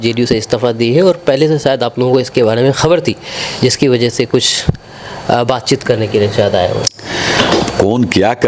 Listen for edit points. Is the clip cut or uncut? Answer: uncut